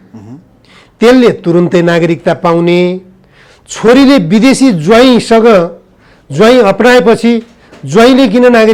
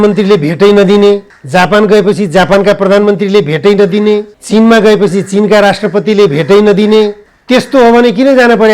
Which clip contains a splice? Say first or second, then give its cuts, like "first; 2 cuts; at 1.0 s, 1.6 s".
second; 3 cuts; at 1.3 s, 4.3 s, 7.3 s